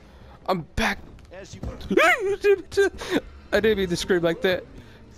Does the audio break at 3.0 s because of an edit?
yes; 1 cut; at 3.0 s

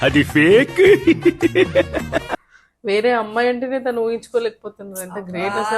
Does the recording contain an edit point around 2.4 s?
yes; 1 cut; at 2.4 s

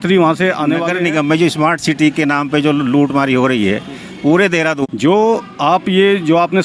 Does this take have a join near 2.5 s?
no; 2 cuts; at 0.9 s, 4.8 s

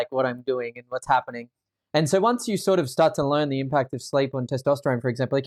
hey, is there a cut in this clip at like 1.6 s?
no; 0 cuts

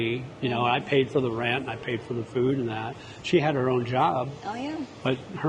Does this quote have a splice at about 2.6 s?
no; 0 cuts

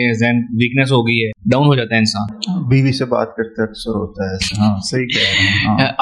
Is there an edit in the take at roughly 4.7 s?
no; 1 cut; at 1.3 s

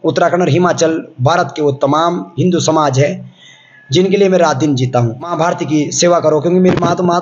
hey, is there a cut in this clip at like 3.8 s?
no; 1 cut; at 5.3 s

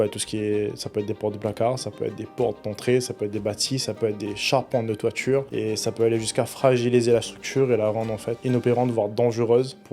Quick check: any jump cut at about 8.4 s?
yes; 2 cuts; at 5.5 s, 8.4 s

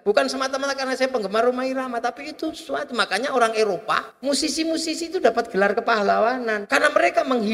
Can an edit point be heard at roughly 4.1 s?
yes; 2 cuts; at 4.1 s, 6.6 s

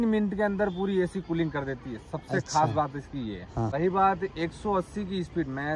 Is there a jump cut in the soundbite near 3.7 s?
yes; 1 cut; at 3.7 s

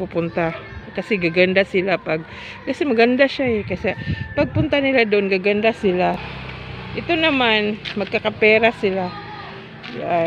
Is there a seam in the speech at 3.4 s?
no; 1 cut; at 6.3 s

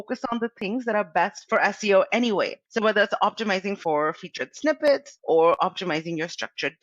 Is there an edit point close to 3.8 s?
yes; 1 cut; at 3.8 s

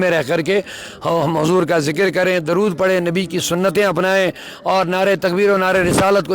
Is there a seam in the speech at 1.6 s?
no; 1 cut; at 3.0 s

